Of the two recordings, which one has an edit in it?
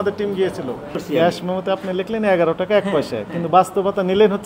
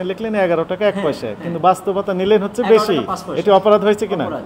first; 1 cut; at 1.0 s

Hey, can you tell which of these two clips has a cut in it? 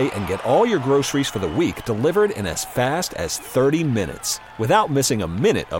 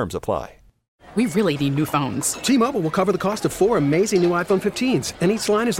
second; 1 cut; at 1.0 s

